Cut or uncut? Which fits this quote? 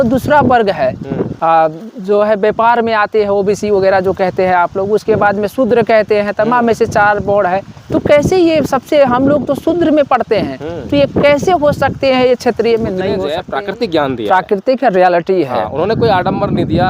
cut